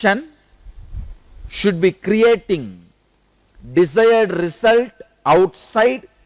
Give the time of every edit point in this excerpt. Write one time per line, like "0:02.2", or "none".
none